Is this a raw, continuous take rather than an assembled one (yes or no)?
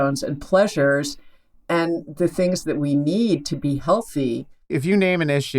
no